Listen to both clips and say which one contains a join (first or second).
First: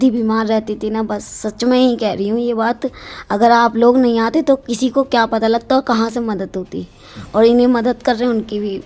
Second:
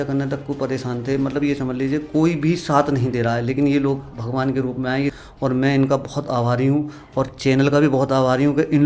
second